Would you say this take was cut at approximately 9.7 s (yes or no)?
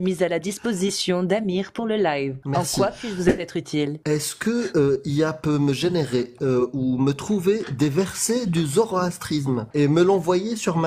yes